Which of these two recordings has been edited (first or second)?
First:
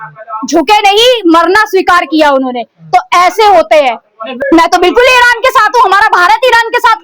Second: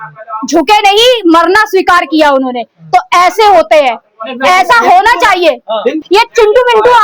first